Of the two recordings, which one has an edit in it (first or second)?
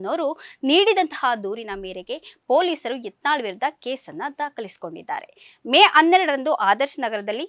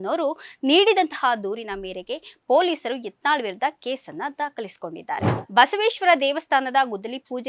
second